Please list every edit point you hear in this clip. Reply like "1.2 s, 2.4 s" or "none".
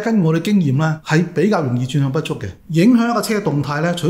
2.5 s

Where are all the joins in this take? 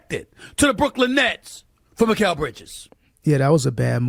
none

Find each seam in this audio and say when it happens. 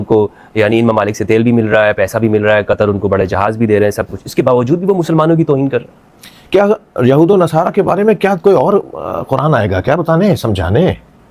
none

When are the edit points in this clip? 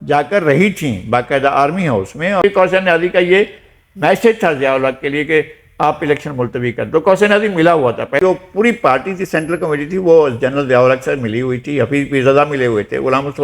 2.4 s, 8.2 s

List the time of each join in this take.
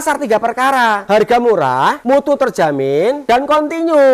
1.0 s, 2.0 s, 3.2 s

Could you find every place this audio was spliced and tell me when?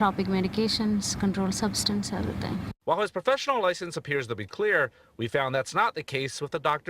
2.7 s

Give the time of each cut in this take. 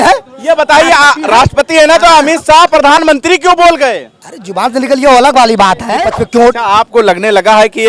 6.0 s

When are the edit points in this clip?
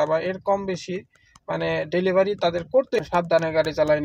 3.0 s

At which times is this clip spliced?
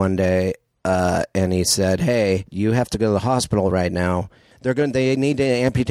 2.5 s, 4.5 s

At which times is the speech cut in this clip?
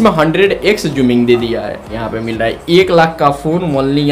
2.0 s

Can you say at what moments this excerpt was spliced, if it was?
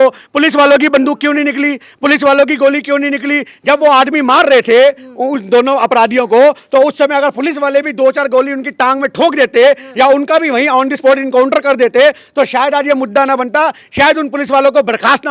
none

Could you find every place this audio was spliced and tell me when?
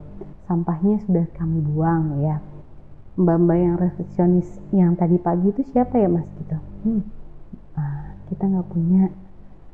none

